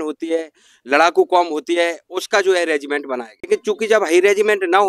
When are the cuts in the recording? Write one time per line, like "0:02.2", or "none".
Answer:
0:03.4